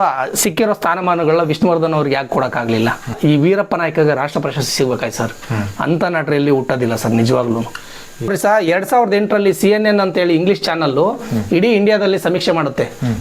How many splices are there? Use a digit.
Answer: 2